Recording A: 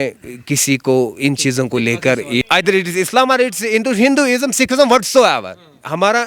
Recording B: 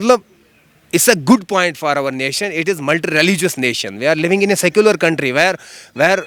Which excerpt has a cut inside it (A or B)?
A